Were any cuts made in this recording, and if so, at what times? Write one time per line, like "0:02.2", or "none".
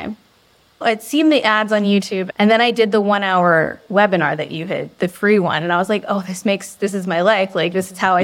0:00.8
0:02.2

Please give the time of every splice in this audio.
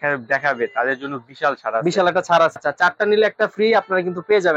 0:02.5

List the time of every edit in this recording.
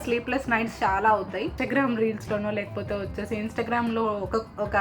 0:01.6

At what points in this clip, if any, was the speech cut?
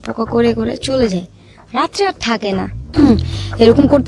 0:02.8

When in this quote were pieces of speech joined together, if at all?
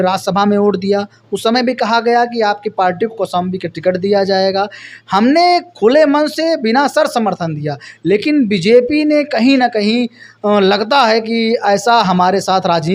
none

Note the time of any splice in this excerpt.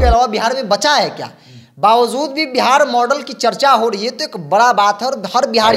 none

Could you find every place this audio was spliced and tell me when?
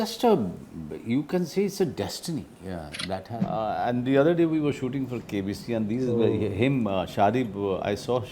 0:03.3

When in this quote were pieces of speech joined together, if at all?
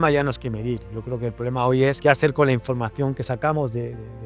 0:02.0

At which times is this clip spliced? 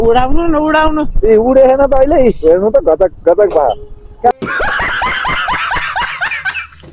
0:04.4

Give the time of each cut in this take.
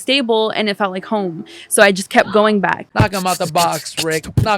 0:02.9

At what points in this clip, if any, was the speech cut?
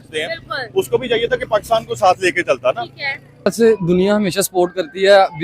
0:03.5

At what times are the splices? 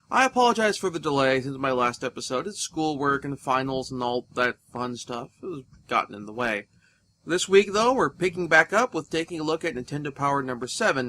0:04.3

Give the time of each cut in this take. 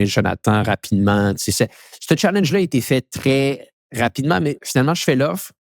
0:04.6

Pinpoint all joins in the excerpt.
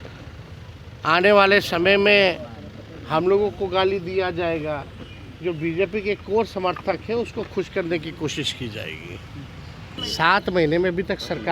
0:10.0

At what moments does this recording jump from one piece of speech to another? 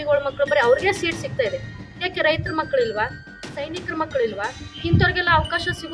0:04.6

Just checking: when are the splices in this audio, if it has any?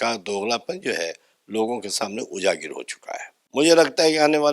0:03.3

